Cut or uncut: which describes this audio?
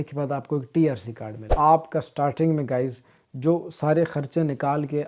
cut